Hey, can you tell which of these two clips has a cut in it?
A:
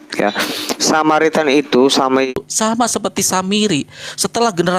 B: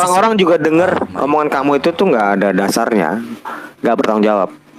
A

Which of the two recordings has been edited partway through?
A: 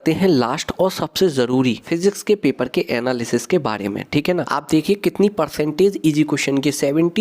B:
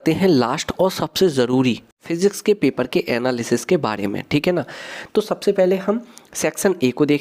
A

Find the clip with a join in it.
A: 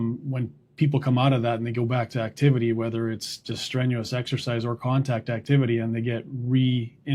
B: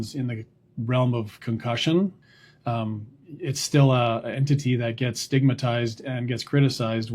B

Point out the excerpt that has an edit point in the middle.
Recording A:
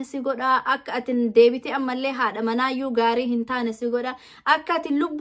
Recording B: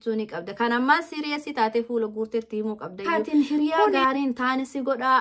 B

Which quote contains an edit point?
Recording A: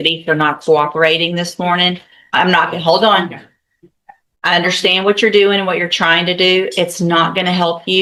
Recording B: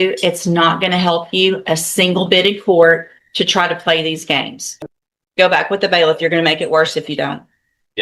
B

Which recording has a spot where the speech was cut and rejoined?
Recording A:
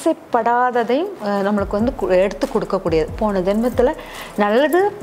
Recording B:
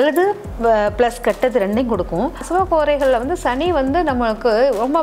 B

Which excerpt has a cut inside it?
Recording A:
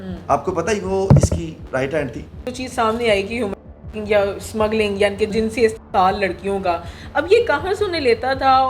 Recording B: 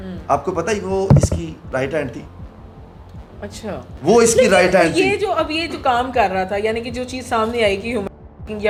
A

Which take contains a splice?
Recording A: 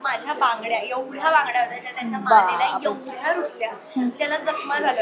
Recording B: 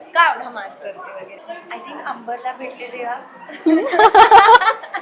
B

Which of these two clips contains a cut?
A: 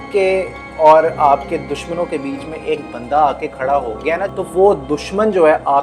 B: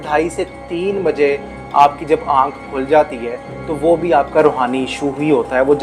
A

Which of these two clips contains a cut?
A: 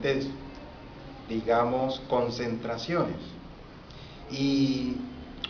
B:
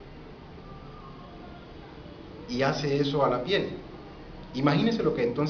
A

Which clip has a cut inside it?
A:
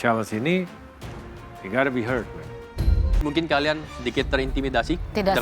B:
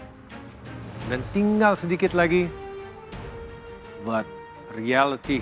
A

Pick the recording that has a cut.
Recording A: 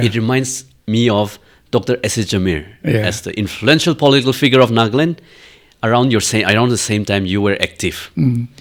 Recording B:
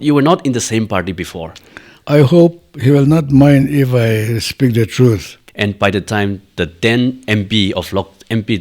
B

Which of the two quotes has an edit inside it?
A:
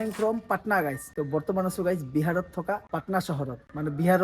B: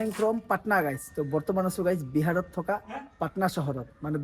A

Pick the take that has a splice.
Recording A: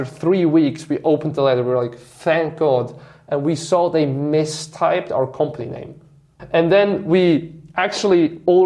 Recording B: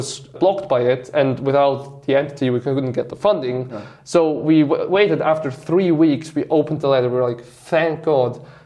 A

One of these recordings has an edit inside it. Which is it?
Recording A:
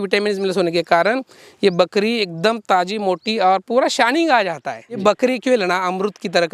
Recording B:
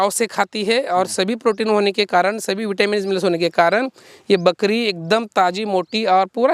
A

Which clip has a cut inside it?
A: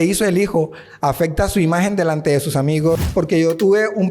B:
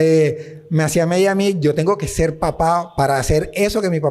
A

